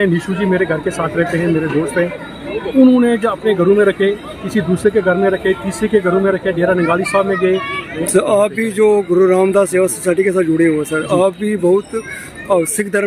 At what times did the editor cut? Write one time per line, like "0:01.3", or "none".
0:07.9